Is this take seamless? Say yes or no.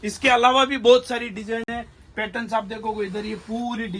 yes